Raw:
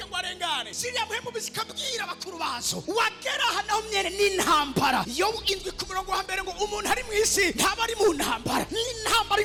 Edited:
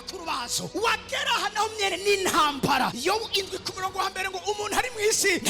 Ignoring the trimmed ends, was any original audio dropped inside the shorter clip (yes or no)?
no